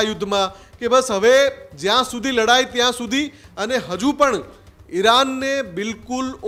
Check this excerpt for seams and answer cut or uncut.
uncut